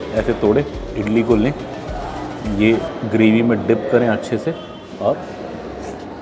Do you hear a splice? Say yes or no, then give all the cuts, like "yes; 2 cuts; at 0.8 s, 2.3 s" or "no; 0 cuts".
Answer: no; 0 cuts